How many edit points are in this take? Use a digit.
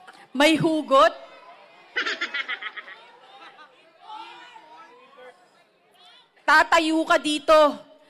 0